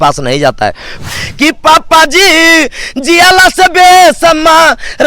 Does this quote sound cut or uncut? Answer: cut